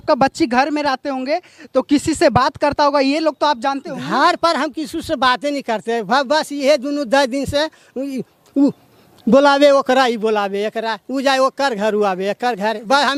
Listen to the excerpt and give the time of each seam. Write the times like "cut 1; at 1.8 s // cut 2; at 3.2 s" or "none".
none